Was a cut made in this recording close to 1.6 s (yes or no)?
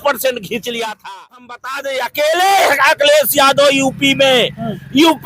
yes